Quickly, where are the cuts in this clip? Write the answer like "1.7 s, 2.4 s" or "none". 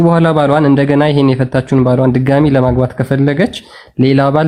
none